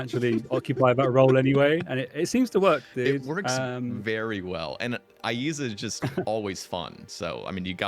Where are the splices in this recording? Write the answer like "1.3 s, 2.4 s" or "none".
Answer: none